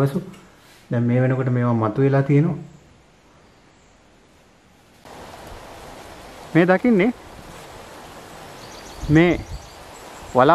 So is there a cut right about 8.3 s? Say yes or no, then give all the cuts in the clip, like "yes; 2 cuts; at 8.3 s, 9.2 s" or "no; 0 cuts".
no; 1 cut; at 5.0 s